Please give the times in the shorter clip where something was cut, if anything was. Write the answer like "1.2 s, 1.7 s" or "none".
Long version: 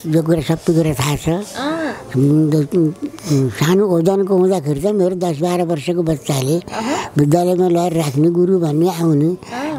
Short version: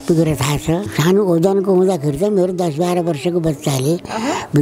0.9 s